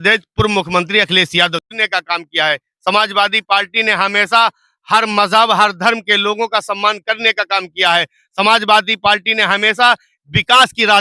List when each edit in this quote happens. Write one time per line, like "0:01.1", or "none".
0:01.6